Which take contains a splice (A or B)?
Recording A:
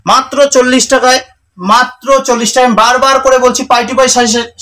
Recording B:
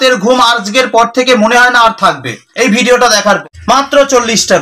B